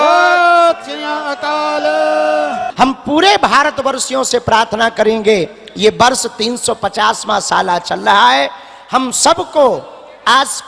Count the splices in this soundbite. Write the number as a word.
one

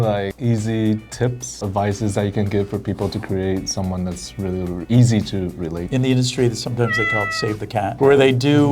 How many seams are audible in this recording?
two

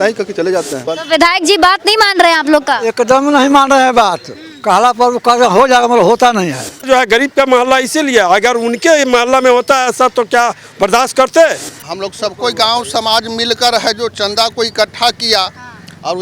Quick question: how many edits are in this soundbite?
three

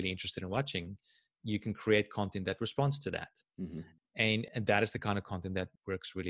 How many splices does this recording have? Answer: zero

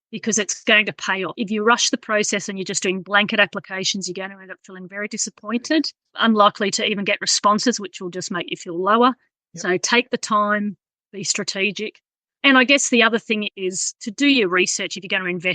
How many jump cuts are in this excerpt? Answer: one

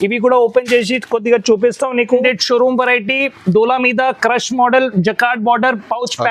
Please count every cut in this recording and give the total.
one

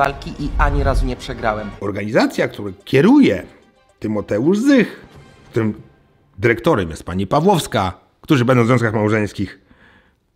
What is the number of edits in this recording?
one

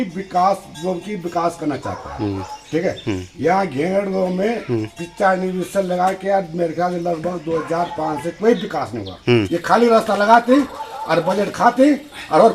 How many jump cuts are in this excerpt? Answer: one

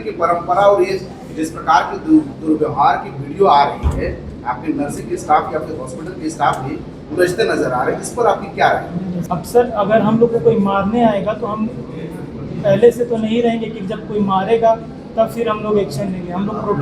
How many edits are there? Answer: one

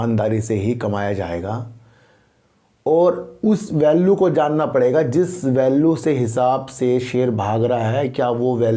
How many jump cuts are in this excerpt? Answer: zero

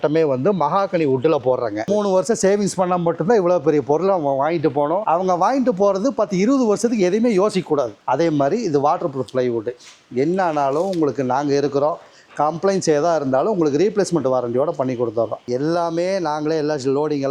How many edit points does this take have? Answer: four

